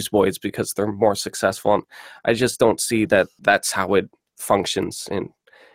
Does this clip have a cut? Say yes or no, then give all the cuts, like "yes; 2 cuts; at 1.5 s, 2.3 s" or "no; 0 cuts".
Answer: yes; 1 cut; at 3.3 s